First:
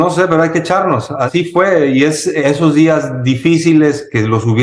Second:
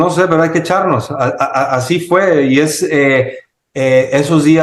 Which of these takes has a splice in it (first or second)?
first